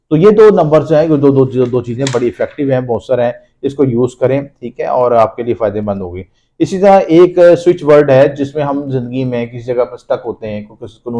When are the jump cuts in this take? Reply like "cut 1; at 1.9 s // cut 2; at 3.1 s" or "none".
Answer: none